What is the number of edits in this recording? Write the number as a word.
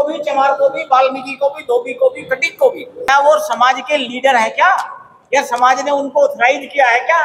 one